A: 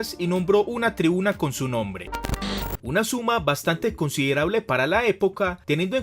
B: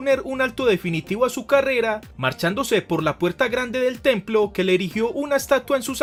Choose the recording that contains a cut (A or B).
A